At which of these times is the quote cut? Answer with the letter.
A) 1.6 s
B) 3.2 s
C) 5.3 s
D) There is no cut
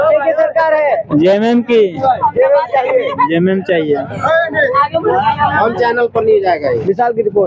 D